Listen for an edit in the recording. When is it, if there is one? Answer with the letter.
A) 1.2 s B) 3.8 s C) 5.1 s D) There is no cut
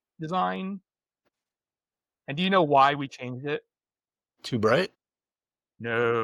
D